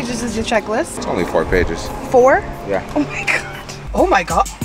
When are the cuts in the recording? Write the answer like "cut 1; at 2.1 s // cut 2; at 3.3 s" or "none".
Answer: cut 1; at 1.0 s // cut 2; at 3.7 s